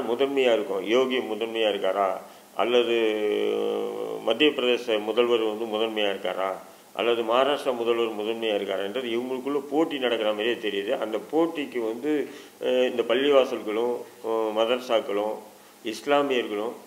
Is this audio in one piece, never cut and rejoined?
yes; 0 cuts

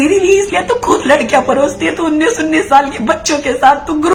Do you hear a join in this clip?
no; 0 cuts

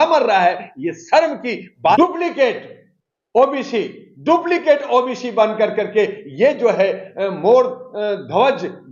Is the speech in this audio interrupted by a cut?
yes; 1 cut; at 2.0 s

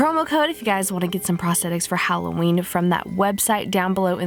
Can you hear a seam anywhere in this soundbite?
no; 0 cuts

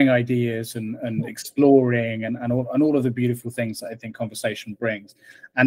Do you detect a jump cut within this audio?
no; 0 cuts

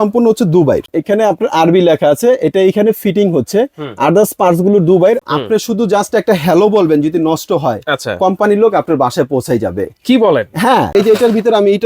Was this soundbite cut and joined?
yes; 3 cuts; at 0.9 s, 5.2 s, 10.9 s

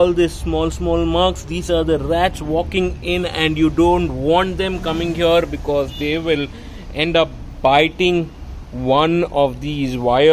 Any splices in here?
no; 0 cuts

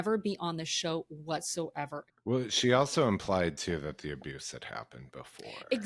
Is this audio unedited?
no; 1 cut; at 2.2 s

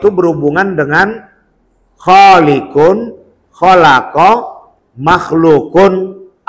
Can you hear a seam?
no; 0 cuts

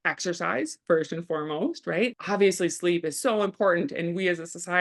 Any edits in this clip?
yes; 1 cut; at 2.1 s

